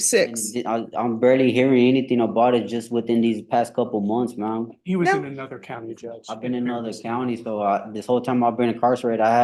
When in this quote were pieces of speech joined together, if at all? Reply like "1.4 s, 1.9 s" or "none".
none